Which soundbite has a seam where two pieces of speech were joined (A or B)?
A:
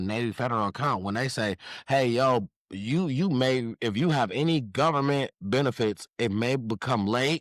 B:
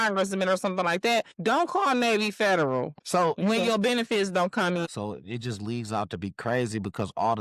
B